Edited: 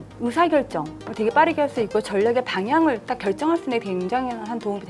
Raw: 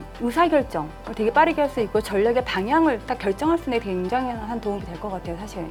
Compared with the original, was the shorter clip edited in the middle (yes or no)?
no